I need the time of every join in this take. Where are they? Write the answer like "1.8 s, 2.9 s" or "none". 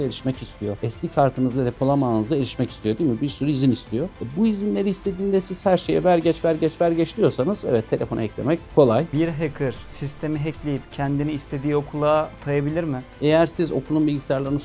9.1 s, 13.1 s